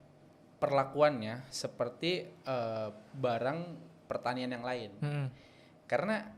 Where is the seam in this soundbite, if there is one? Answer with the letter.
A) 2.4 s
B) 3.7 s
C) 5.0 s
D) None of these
D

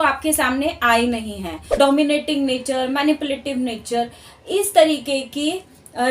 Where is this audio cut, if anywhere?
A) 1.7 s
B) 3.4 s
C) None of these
A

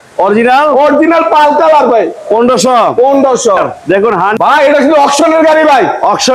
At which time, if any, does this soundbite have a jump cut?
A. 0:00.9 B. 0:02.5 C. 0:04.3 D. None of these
C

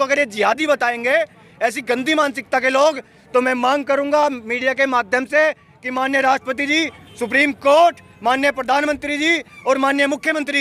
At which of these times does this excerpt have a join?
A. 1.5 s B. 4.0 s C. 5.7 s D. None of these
D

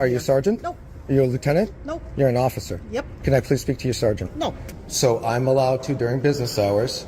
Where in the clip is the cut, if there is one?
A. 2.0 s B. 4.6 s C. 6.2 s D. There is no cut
B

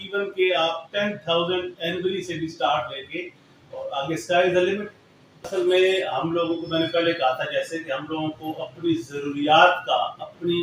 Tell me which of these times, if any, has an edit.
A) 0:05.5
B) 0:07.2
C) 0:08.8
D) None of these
A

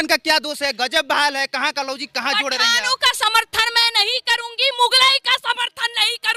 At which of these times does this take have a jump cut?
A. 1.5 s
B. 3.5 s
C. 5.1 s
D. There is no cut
D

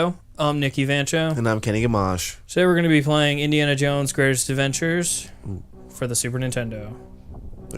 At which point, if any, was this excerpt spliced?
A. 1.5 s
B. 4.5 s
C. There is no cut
B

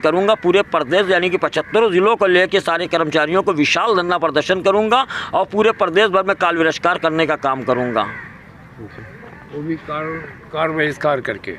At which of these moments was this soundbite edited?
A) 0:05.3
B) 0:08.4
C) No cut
C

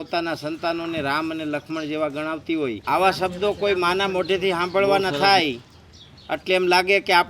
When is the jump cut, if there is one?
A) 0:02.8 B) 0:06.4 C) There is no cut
A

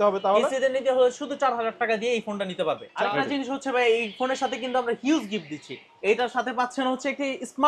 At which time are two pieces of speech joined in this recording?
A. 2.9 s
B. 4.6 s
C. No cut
A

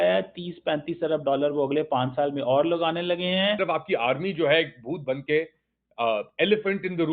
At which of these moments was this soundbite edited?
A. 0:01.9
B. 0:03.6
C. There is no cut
B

